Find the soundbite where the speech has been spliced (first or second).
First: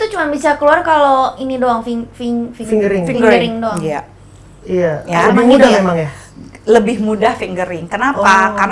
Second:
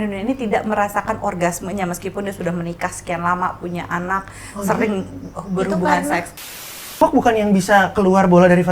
second